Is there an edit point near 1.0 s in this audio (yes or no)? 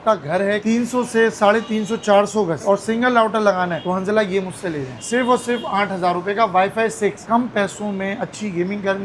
no